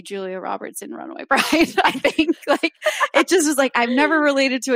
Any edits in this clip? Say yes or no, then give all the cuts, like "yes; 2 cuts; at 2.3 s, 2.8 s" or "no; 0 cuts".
no; 0 cuts